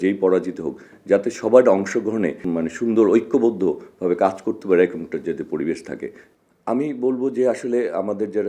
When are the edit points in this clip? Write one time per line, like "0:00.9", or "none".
0:02.4
0:06.2